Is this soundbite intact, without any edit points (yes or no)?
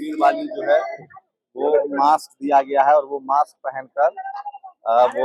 yes